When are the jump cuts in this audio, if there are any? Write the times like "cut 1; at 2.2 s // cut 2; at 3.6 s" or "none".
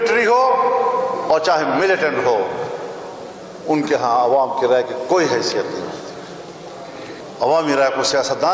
cut 1; at 7.2 s